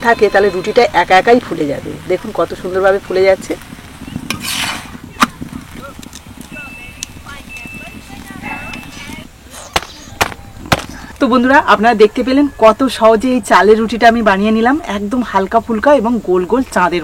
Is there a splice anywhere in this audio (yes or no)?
no